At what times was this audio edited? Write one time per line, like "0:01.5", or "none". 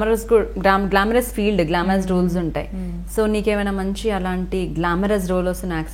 none